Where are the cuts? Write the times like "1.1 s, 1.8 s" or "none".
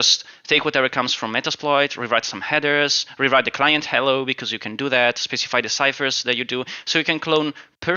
none